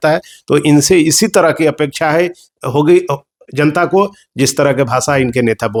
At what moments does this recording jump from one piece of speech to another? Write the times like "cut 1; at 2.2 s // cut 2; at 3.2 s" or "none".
none